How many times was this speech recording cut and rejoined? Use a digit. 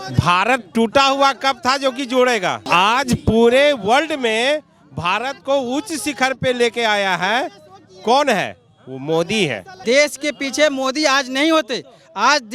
2